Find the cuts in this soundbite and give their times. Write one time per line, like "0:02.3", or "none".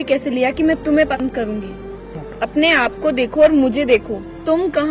0:01.2